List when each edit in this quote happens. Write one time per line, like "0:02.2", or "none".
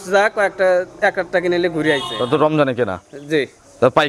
0:02.1